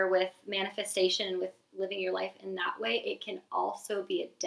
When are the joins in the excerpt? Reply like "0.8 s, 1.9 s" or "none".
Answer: none